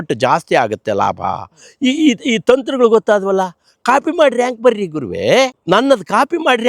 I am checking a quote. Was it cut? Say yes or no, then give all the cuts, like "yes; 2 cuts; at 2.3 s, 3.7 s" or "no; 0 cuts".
yes; 1 cut; at 5.6 s